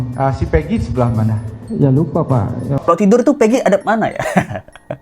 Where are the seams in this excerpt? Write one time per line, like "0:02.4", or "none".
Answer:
0:02.9